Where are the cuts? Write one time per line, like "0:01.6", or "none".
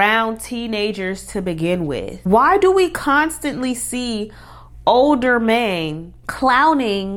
none